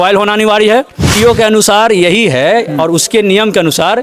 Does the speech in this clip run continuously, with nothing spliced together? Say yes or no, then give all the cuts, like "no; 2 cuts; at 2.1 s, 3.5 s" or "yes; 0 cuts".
no; 1 cut; at 1.1 s